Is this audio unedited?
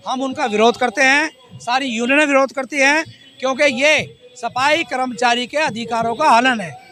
yes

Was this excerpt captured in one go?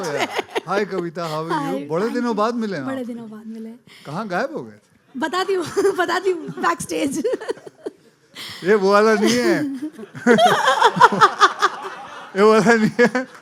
yes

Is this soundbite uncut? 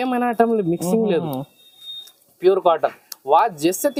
yes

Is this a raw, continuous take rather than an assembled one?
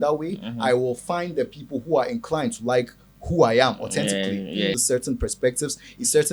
no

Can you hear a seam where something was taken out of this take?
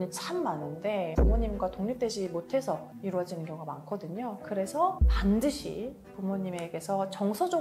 yes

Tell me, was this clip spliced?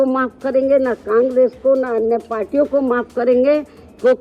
no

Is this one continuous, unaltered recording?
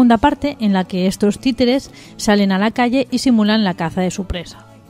no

